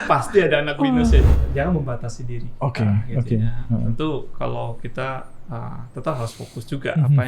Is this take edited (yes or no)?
yes